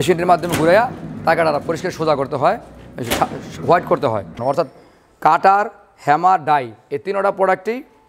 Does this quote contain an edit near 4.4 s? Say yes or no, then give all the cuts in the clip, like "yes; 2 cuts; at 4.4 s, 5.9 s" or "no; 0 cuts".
yes; 1 cut; at 4.4 s